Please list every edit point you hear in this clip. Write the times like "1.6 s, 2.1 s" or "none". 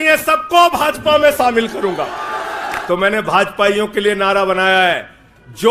2.7 s